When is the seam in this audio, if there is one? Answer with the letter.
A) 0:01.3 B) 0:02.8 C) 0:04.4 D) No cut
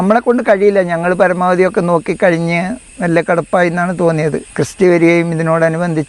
C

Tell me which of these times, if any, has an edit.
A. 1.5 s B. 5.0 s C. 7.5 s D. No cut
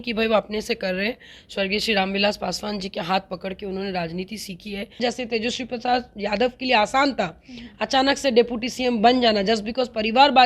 B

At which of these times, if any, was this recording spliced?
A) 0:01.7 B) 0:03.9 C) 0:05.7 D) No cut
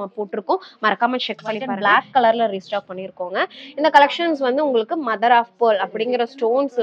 A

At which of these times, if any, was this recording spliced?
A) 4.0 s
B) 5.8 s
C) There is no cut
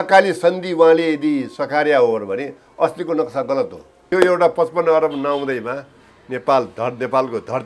A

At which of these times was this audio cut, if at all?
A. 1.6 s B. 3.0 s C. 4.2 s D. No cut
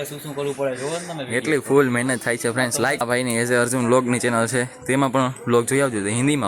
B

